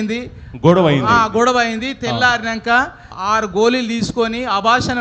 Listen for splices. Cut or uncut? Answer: cut